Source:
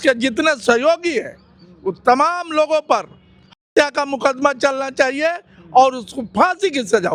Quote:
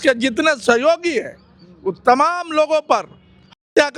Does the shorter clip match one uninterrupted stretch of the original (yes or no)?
yes